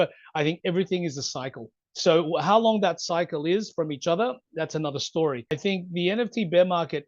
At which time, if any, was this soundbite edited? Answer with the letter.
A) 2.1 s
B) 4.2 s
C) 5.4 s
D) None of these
C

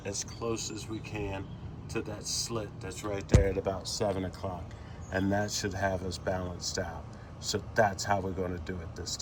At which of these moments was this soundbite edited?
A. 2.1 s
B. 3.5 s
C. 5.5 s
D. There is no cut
D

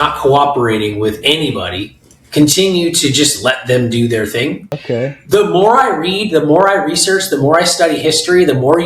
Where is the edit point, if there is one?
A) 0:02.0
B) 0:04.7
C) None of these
B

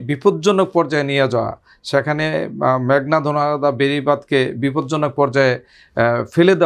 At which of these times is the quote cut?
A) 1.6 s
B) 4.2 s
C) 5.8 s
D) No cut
D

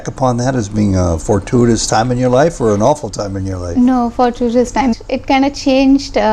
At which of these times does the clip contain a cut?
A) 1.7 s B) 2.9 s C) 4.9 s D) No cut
C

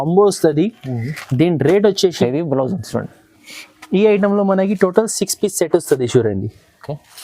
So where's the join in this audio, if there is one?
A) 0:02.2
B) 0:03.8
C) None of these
A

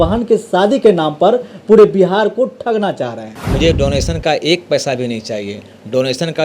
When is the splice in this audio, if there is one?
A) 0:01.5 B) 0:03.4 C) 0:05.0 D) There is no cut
B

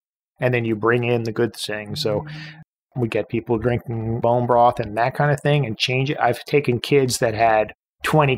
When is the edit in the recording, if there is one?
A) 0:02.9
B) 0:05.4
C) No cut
A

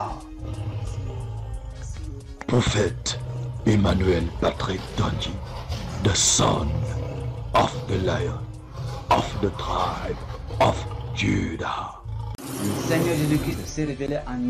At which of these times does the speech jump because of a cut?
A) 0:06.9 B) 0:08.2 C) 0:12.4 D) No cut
C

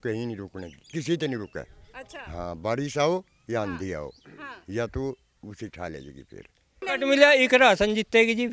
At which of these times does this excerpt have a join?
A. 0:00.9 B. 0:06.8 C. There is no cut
B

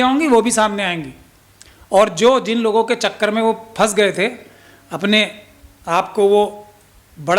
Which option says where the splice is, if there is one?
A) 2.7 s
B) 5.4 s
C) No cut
C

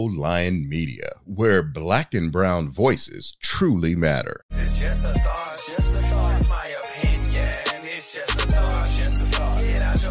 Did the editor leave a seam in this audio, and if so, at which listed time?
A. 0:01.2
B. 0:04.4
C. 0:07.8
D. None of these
B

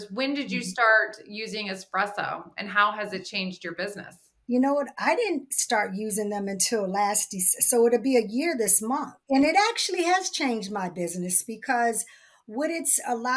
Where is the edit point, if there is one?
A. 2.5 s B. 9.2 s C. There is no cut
B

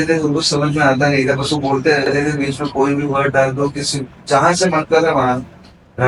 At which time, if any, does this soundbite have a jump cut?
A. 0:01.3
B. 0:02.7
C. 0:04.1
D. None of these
D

